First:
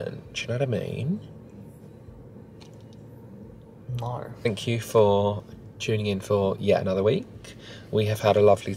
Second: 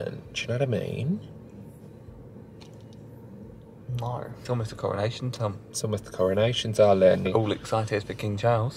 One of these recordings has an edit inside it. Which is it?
second; 2 cuts; at 4.3 s, 7.3 s

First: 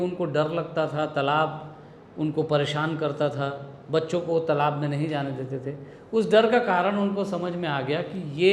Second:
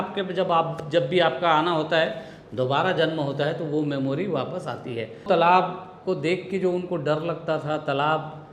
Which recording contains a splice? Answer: second; 1 cut; at 5.2 s

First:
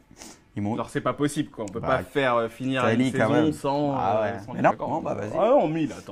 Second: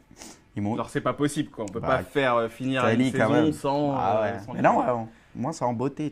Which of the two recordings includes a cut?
second; 1 cut; at 4.7 s

